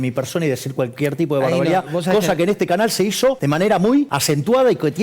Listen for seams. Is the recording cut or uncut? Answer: cut